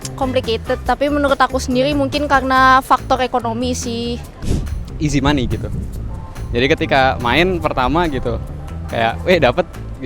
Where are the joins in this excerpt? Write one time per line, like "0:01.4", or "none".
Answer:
0:04.3

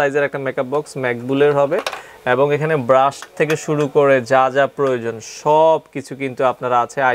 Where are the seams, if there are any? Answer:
none

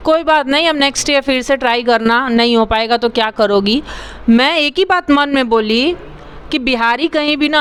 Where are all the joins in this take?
none

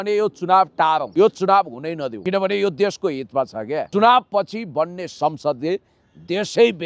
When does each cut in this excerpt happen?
0:01.1
0:02.1
0:03.9

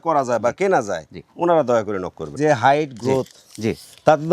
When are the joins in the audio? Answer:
0:02.3

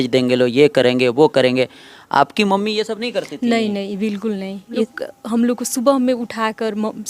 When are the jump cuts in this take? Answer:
0:04.9

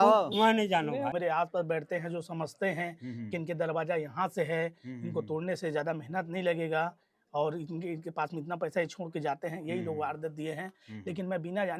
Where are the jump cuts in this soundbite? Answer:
0:01.1

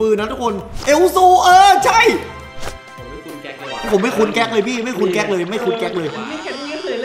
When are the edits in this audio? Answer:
0:02.6

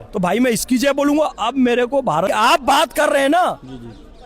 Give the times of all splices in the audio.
0:02.3

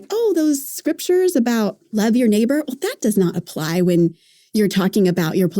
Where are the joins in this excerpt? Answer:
0:02.0
0:04.4

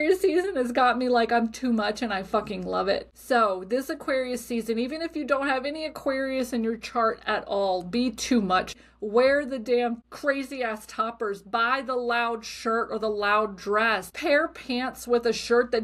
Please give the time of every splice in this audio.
0:03.1
0:08.7
0:10.1
0:14.1

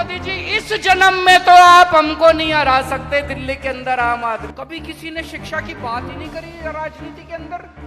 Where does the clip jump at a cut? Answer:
0:04.5

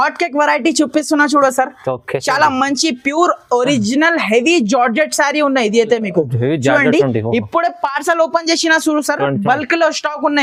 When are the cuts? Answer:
none

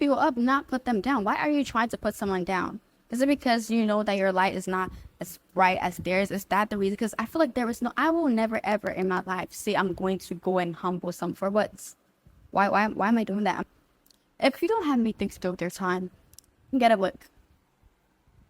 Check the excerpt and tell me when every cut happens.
none

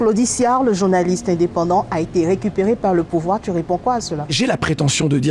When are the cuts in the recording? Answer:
0:04.2

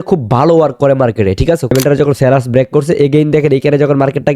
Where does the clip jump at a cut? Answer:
0:01.7

